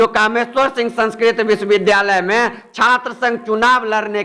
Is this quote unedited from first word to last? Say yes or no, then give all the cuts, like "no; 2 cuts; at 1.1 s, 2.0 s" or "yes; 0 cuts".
yes; 0 cuts